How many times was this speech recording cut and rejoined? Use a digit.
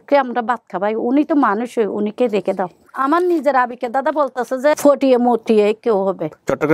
2